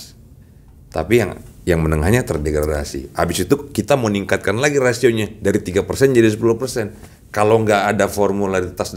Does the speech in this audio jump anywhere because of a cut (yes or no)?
no